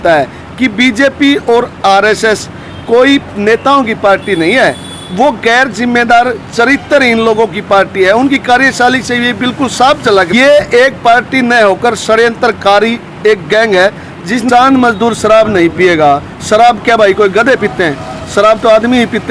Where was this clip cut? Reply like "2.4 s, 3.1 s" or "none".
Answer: 10.3 s, 14.5 s

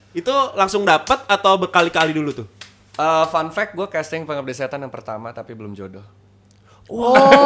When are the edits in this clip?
none

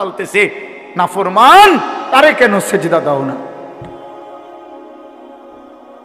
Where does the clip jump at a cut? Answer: 3.8 s

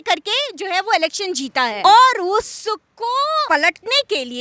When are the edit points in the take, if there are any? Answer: 1.8 s, 3.4 s

